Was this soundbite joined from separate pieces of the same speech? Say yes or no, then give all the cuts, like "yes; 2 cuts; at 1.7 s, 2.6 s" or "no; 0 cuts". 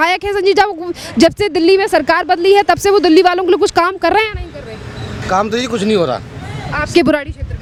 no; 0 cuts